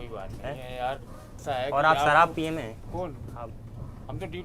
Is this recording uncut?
no; 1 cut; at 1.4 s

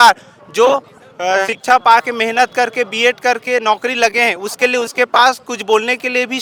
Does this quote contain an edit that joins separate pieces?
no; 0 cuts

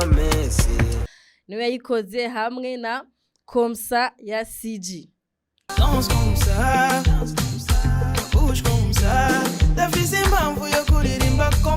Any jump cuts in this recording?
yes; 1 cut; at 1.0 s

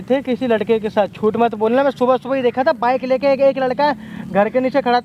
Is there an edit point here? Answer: no; 0 cuts

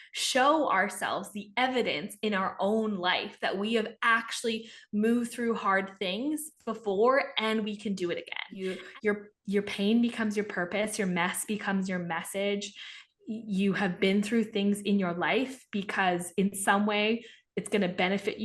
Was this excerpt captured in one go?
no; 1 cut; at 8.8 s

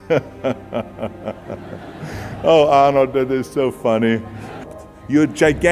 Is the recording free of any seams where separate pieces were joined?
no; 1 cut; at 4.6 s

